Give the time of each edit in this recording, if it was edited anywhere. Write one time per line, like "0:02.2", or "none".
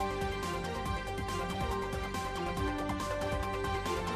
0:02.4